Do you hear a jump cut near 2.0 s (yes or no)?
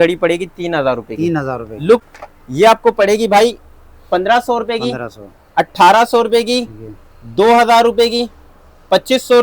yes